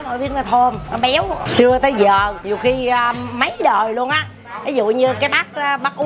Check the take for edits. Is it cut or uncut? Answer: cut